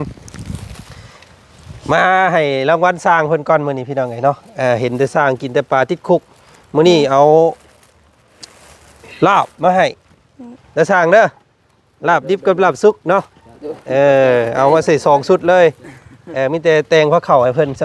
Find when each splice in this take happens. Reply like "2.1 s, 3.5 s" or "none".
none